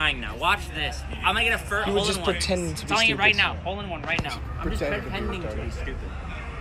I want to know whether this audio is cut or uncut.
uncut